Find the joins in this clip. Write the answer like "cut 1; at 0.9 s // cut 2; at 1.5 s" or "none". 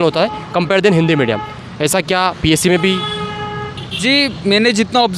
none